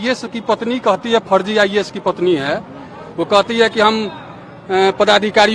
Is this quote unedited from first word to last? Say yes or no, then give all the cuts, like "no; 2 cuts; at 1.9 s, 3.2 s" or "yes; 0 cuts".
yes; 0 cuts